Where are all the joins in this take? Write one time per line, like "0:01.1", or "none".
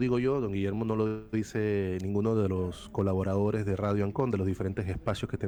none